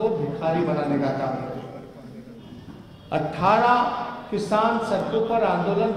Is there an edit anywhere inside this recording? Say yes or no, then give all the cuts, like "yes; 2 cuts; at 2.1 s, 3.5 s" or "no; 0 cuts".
yes; 1 cut; at 2.4 s